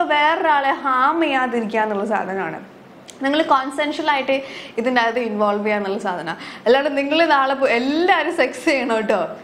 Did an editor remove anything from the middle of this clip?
no; 0 cuts

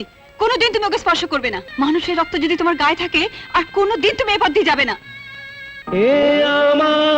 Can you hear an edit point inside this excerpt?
yes; 1 cut; at 1.6 s

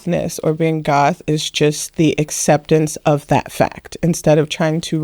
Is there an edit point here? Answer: no; 0 cuts

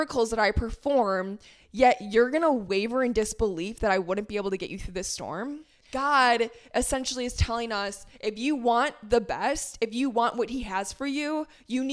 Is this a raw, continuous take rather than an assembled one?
no; 1 cut; at 5.8 s

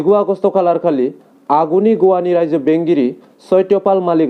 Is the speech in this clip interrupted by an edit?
no; 0 cuts

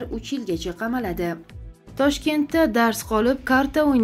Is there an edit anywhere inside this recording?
yes; 1 cut; at 1.5 s

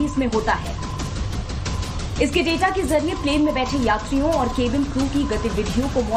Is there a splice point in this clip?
no; 0 cuts

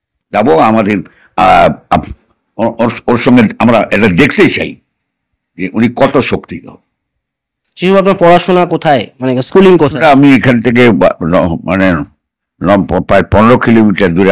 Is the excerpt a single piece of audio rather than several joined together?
no; 1 cut; at 7.6 s

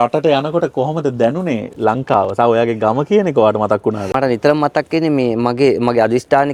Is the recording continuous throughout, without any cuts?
yes; 0 cuts

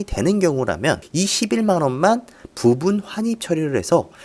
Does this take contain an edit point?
yes; 1 cut; at 1.1 s

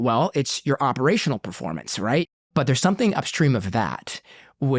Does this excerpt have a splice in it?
yes; 1 cut; at 2.3 s

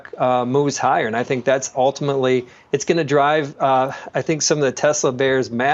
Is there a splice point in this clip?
no; 0 cuts

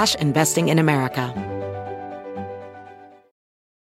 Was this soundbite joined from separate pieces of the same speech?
yes; 1 cut; at 1.3 s

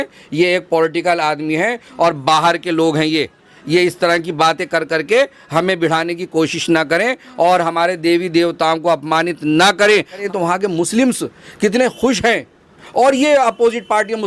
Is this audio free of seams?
no; 1 cut; at 10.2 s

